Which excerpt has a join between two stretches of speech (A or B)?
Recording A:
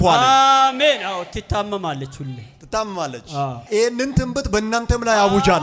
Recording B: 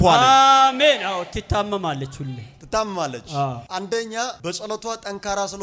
A